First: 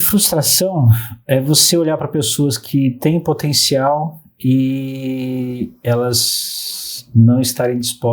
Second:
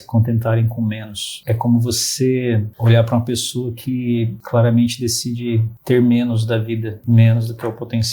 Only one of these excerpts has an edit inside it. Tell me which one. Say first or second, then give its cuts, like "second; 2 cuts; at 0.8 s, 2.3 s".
second; 5 cuts; at 1.4 s, 2.7 s, 4.4 s, 5.7 s, 7.0 s